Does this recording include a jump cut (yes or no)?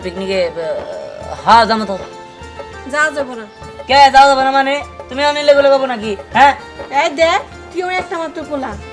no